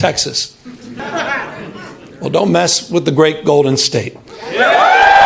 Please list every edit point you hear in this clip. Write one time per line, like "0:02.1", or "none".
0:01.0